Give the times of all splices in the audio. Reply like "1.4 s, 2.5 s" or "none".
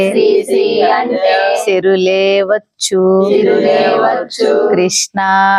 none

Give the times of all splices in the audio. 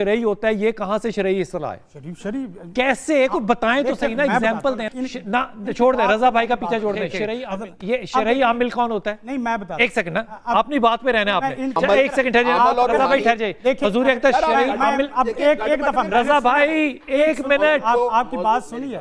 4.9 s, 7.4 s, 11.8 s

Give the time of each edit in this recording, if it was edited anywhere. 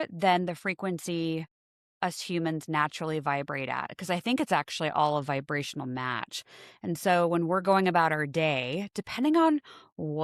none

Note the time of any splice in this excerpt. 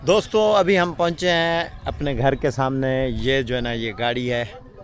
none

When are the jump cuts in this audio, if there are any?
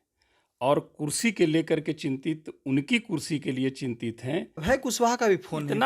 4.5 s

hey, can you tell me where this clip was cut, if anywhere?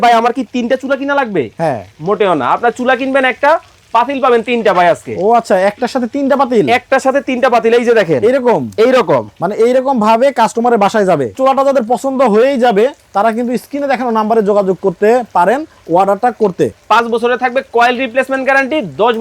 11.3 s, 16.8 s

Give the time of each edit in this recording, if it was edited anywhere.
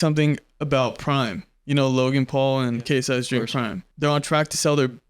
3.8 s

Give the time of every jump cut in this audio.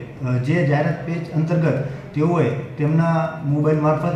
none

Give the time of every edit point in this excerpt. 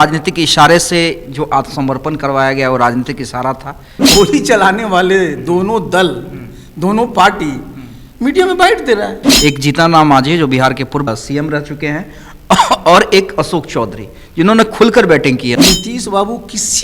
4.1 s, 9.2 s, 15.6 s

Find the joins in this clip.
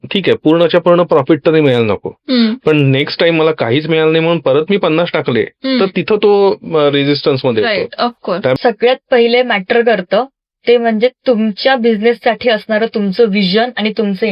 8.6 s

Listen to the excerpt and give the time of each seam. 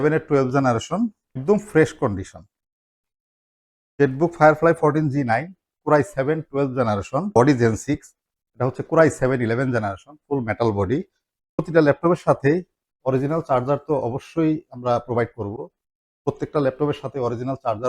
1.4 s, 7.3 s, 11.7 s

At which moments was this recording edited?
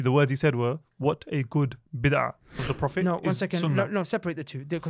2.7 s

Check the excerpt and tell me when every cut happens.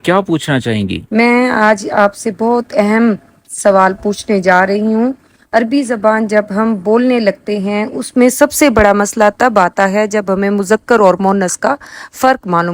none

